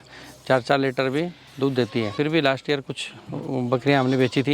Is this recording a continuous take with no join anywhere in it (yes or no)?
no